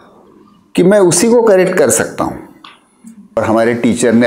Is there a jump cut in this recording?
yes; 1 cut; at 3.4 s

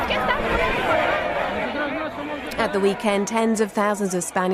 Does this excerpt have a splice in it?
no; 0 cuts

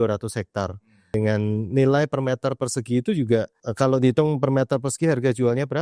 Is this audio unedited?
no; 2 cuts; at 1.1 s, 3.6 s

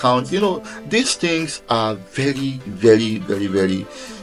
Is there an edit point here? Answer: no; 0 cuts

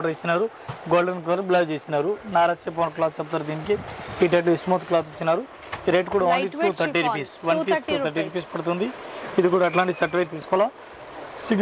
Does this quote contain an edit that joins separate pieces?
no; 0 cuts

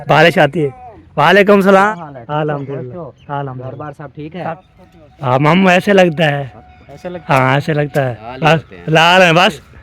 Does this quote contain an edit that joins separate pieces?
yes; 3 cuts; at 1.9 s, 4.5 s, 8.2 s

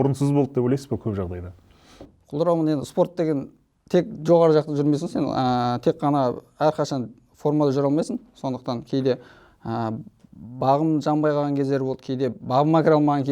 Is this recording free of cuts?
yes; 0 cuts

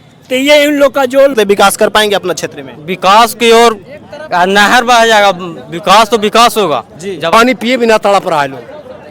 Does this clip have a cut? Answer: yes; 2 cuts; at 1.3 s, 7.3 s

